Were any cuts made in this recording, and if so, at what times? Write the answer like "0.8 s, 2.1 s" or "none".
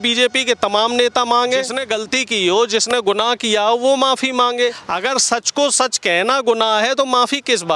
1.8 s, 4.9 s